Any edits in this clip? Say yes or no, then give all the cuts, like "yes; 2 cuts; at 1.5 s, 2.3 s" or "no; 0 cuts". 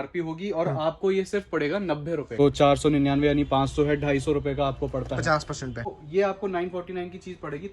yes; 2 cuts; at 2.4 s, 6.0 s